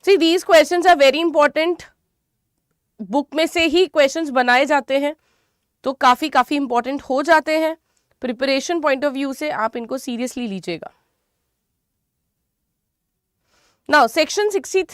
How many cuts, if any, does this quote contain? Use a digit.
0